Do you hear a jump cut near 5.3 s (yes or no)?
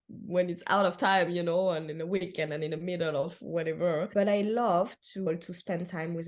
yes